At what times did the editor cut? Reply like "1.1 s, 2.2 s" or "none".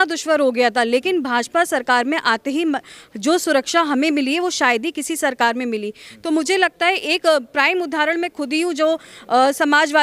none